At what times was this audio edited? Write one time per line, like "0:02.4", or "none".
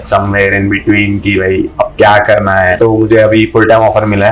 0:02.7